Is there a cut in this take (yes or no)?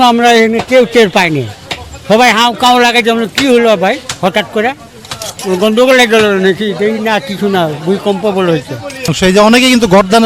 yes